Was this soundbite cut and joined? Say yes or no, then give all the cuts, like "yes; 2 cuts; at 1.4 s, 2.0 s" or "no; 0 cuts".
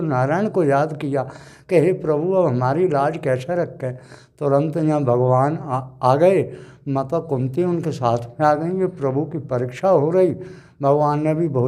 no; 0 cuts